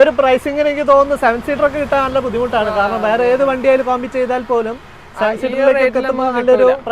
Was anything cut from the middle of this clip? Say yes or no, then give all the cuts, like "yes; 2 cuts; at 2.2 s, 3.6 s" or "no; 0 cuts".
no; 0 cuts